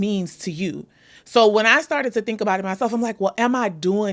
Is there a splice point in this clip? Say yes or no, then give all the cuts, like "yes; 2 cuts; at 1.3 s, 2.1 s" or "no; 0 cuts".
no; 0 cuts